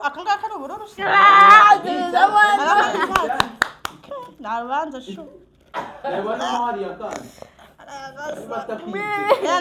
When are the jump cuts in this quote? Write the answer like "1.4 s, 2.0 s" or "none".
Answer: none